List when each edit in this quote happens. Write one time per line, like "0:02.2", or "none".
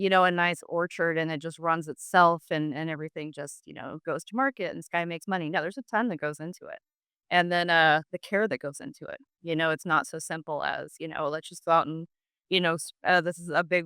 none